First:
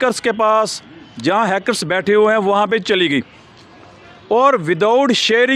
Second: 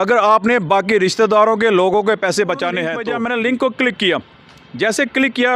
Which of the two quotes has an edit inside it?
second; 1 cut; at 3.0 s

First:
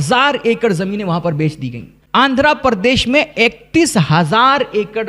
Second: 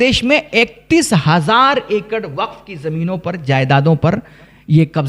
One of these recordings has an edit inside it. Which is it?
first; 1 cut; at 1.9 s

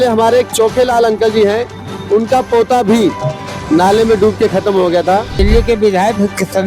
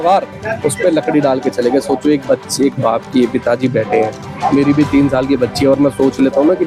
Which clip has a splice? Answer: first; 1 cut; at 5.3 s

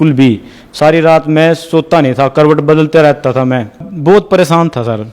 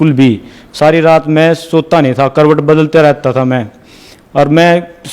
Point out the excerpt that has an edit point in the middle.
first; 1 cut; at 3.9 s

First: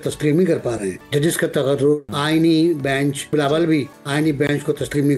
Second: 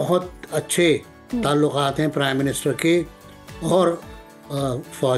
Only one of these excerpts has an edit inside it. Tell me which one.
first; 4 cuts; at 1.0 s, 2.1 s, 3.3 s, 4.0 s

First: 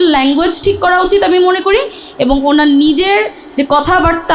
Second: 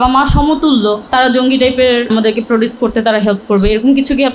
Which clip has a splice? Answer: second; 2 cuts; at 1.0 s, 2.1 s

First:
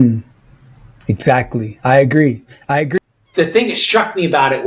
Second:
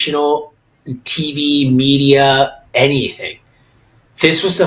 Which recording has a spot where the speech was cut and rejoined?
first; 1 cut; at 2.9 s

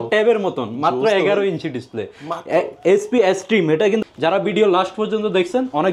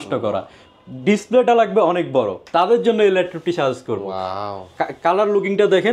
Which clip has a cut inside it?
first; 1 cut; at 4.0 s

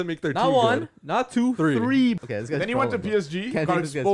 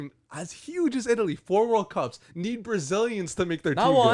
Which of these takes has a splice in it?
first; 1 cut; at 2.2 s

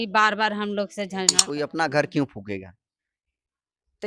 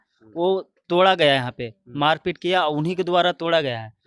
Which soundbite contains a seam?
first; 1 cut; at 1.4 s

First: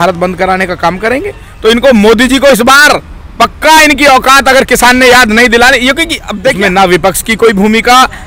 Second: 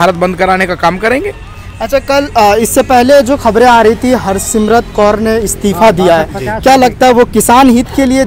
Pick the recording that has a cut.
first; 2 cuts; at 1.5 s, 6.6 s

